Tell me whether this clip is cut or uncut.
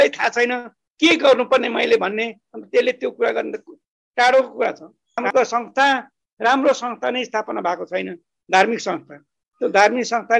uncut